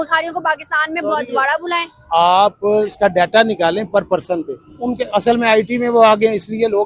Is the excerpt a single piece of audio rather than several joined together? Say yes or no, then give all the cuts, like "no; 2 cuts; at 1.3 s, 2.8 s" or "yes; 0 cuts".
no; 2 cuts; at 2.9 s, 4.6 s